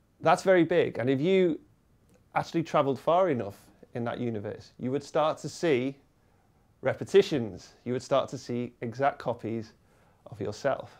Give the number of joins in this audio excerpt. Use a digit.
0